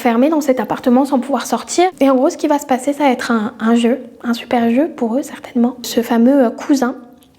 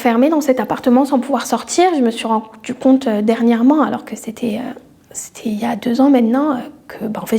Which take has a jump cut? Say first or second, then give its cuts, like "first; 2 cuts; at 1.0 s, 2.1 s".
first; 2 cuts; at 1.9 s, 5.9 s